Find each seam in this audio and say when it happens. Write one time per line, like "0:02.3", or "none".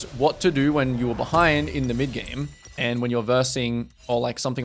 none